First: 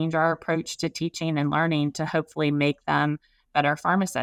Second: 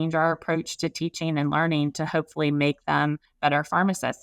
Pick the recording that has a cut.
second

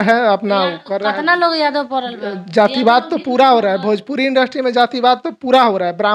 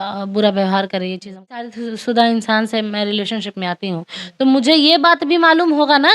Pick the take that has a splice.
second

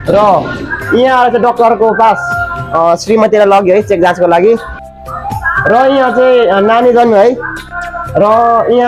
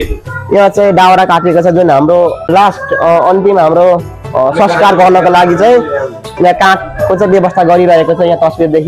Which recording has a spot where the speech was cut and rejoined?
second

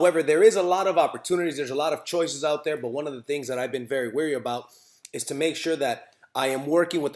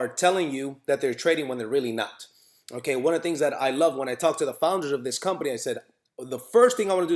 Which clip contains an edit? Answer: second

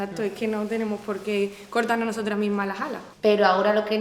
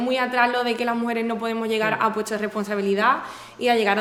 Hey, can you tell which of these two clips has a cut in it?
first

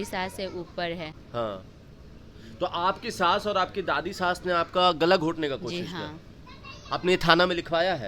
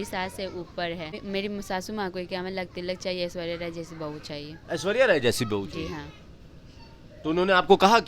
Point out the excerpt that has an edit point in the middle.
second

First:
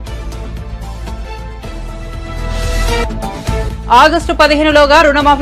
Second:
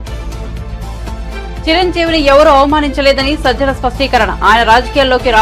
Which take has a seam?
second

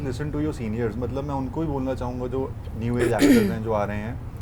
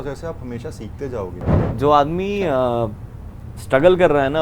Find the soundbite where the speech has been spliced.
second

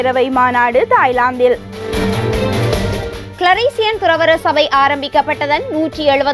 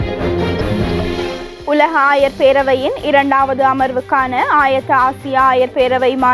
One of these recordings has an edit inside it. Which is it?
second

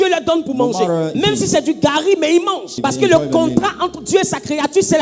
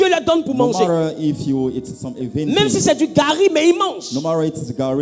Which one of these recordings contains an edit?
first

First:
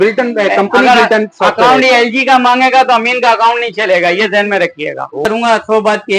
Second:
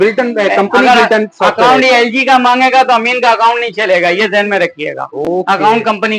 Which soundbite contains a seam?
first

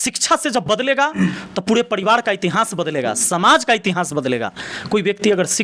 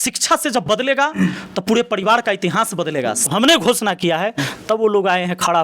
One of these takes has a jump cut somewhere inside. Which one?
second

